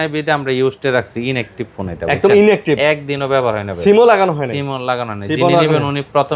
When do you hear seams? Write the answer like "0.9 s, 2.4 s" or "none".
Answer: none